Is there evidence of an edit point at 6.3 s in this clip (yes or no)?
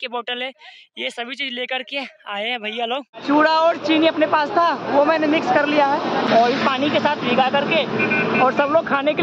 yes